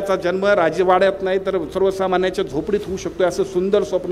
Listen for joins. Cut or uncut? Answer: uncut